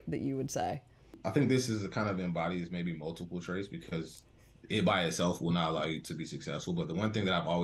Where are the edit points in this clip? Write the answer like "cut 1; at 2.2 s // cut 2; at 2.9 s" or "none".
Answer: cut 1; at 1.2 s